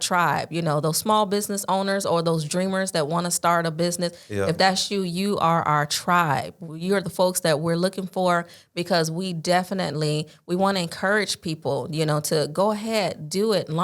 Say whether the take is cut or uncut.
uncut